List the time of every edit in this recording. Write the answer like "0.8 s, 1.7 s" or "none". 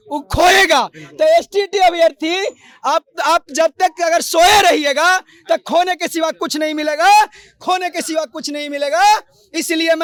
none